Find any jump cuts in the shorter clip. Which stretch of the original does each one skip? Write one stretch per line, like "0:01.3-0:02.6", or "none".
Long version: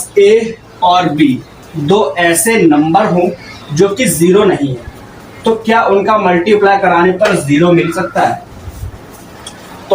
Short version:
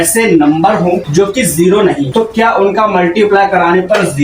0:03.4-0:03.7
0:04.7-0:05.4